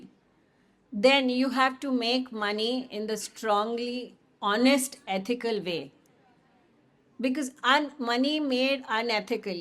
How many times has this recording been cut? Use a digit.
0